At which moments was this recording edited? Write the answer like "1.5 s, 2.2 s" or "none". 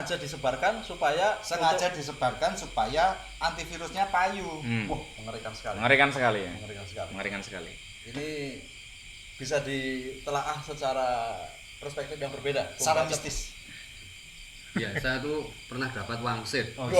none